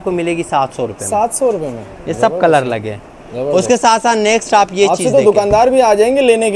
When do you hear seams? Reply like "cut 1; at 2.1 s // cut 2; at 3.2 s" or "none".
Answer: none